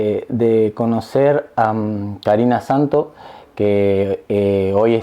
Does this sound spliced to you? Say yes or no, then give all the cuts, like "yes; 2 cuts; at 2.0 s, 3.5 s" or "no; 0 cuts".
no; 0 cuts